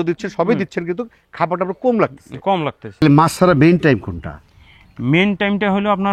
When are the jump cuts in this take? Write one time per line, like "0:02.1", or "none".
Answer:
0:03.0